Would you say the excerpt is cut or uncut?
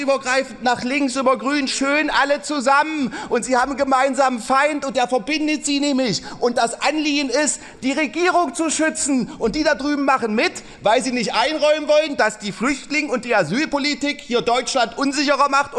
uncut